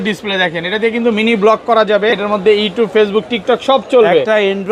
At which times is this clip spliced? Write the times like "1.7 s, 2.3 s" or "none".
2.1 s